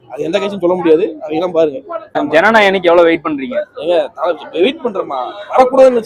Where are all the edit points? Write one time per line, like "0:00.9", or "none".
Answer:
0:02.2